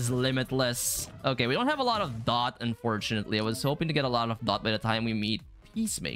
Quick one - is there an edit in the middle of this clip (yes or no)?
no